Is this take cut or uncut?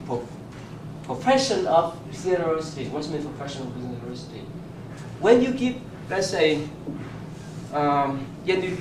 uncut